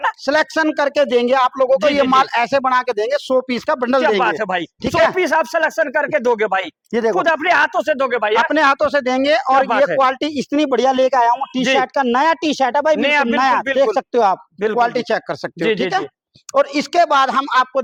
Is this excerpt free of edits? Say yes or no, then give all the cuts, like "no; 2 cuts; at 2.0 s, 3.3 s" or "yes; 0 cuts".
yes; 0 cuts